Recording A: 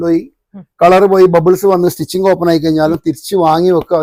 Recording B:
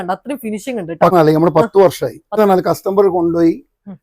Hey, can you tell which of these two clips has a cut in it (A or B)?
B